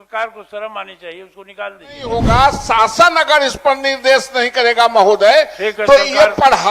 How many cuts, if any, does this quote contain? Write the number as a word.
one